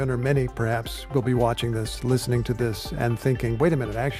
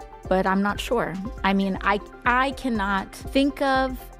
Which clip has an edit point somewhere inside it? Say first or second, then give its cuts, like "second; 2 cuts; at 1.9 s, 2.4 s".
second; 1 cut; at 3.1 s